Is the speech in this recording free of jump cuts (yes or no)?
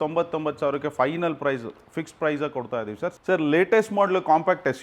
no